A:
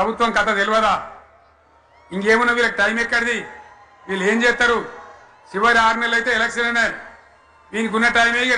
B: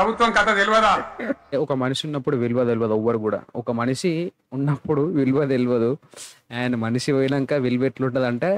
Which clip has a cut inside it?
B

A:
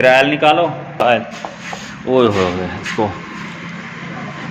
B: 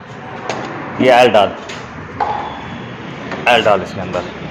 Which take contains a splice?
A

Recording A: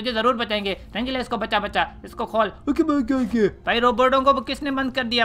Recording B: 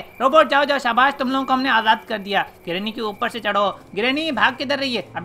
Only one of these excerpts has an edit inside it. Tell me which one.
A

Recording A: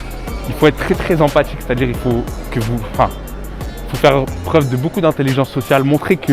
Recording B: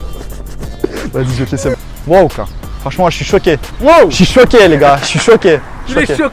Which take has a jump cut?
B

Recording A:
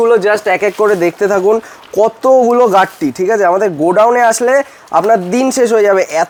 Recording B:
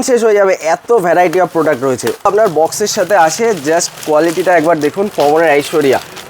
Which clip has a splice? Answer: B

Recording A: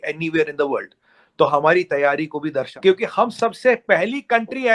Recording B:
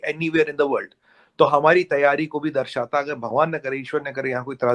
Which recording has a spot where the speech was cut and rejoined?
A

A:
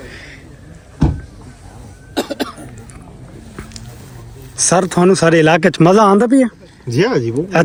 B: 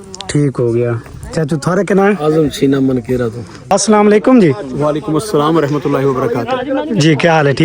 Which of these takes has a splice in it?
B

